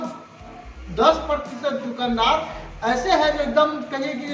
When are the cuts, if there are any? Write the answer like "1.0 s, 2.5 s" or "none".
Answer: none